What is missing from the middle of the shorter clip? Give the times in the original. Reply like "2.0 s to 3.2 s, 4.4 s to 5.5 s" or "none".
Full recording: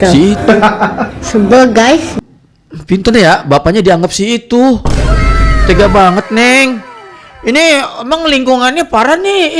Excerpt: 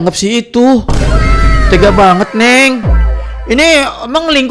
none